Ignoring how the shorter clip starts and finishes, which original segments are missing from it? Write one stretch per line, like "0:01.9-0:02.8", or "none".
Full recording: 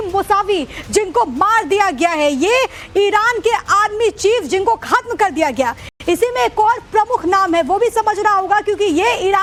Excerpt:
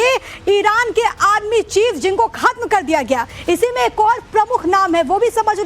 0:05.8-0:05.9